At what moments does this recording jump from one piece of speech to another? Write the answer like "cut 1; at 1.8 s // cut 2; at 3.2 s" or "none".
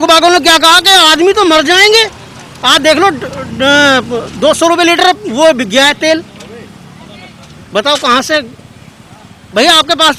none